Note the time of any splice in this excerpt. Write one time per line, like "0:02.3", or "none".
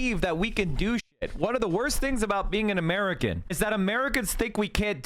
0:03.4